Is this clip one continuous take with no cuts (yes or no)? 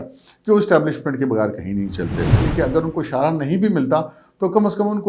no